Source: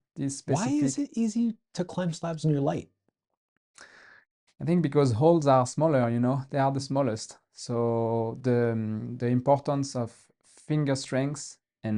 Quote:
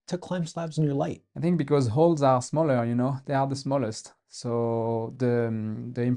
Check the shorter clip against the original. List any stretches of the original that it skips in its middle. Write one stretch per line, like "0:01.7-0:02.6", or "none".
0:02.9-0:04.5